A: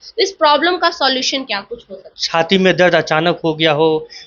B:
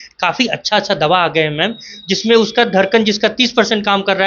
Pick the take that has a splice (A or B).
A